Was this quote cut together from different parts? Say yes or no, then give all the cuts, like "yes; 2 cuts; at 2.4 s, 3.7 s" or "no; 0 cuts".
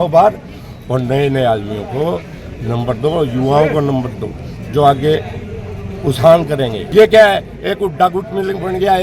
yes; 1 cut; at 6.8 s